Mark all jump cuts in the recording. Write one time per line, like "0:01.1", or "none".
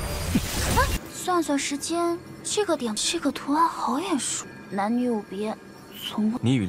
0:01.0